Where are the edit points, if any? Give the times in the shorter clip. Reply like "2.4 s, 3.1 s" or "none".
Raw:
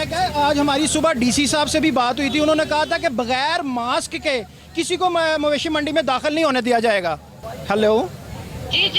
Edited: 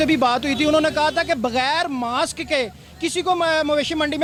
none